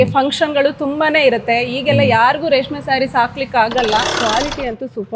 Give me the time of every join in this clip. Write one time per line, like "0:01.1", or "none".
0:04.2